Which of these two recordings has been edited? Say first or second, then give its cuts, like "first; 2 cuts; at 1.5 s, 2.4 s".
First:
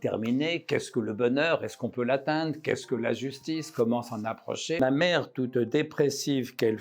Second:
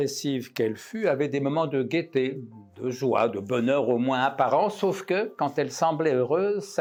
first; 1 cut; at 4.8 s